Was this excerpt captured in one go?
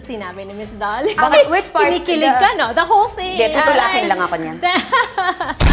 yes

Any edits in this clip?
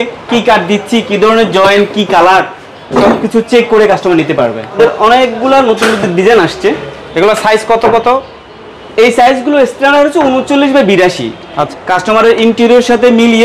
yes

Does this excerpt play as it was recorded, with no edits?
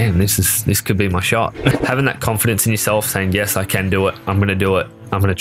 no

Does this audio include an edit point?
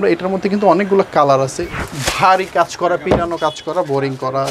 yes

